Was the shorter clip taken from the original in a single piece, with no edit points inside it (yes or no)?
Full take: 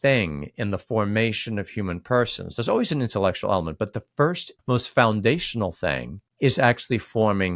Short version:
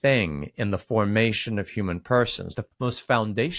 no